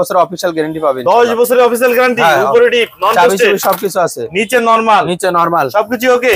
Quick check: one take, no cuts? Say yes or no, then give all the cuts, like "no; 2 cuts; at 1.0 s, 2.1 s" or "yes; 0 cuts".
yes; 0 cuts